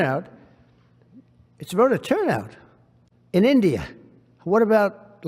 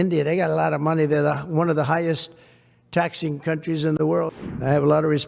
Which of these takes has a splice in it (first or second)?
second